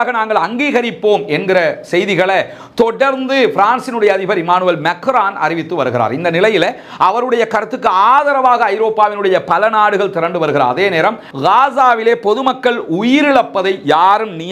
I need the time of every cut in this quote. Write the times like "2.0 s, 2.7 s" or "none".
11.3 s